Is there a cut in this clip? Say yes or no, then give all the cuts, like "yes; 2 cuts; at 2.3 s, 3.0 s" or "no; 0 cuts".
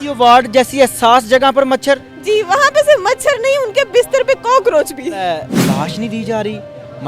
yes; 1 cut; at 5.5 s